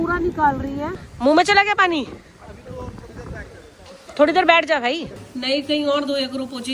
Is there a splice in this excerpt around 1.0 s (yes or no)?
yes